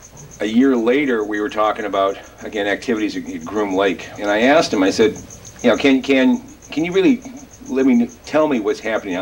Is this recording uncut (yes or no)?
no